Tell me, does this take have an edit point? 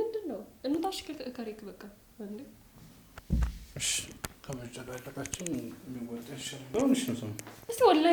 yes; 1 cut; at 6.7 s

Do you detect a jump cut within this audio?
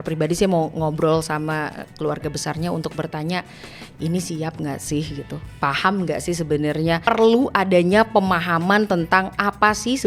yes; 1 cut; at 7.0 s

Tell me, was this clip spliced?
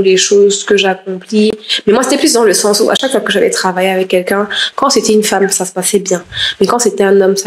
no; 0 cuts

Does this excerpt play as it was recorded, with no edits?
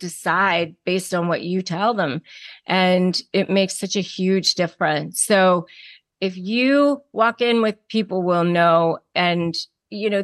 no; 2 cuts; at 7.8 s, 9.1 s

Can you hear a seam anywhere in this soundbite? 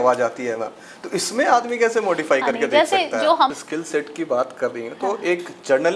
yes; 1 cut; at 3.5 s

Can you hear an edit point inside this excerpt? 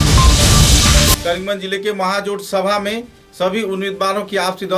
yes; 1 cut; at 1.2 s

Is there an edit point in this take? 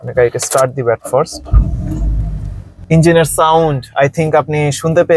no; 0 cuts

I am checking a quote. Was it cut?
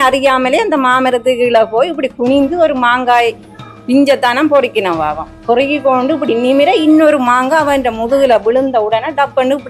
no; 0 cuts

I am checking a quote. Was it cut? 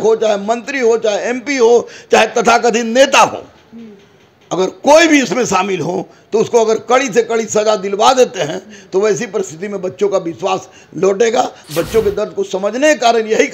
yes; 1 cut; at 11.6 s

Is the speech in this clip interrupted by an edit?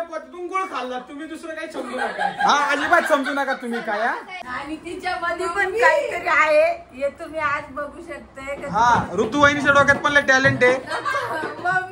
yes; 1 cut; at 4.3 s

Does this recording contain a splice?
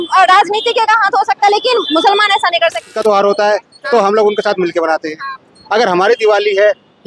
yes; 1 cut; at 2.8 s

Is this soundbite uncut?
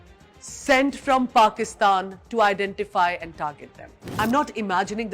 yes; 0 cuts

